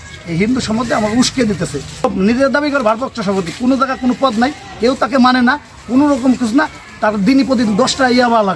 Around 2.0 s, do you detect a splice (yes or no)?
yes